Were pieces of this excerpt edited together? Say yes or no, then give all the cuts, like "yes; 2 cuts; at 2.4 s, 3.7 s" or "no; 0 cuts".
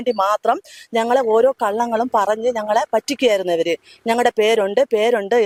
no; 0 cuts